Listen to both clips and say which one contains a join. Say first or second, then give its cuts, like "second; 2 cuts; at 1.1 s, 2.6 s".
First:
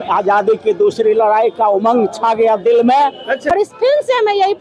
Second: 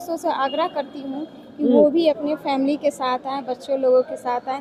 first; 1 cut; at 3.4 s